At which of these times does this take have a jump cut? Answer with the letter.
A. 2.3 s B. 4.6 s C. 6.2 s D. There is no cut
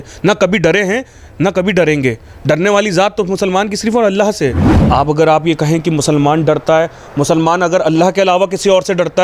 B